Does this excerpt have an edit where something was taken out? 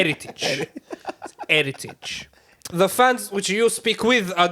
yes; 1 cut; at 2.6 s

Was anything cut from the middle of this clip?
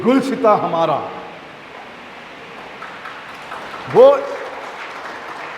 no; 0 cuts

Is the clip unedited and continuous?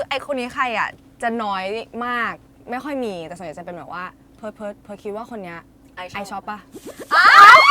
yes; 0 cuts

